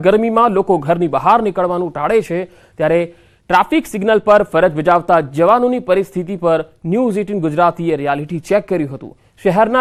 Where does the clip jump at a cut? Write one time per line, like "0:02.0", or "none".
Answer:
none